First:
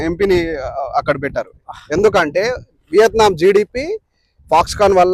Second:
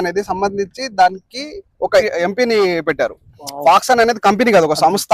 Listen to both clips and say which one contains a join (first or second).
second